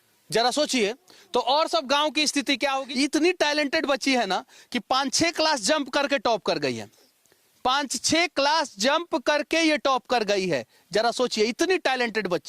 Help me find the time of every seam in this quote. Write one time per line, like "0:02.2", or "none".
0:02.8